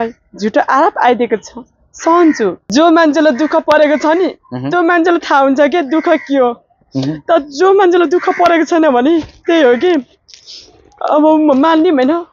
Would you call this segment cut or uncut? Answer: cut